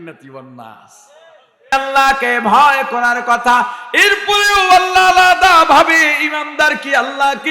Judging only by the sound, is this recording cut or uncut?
cut